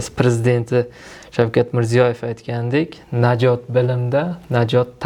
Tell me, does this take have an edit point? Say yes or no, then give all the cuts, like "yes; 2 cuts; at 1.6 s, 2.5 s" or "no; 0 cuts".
no; 0 cuts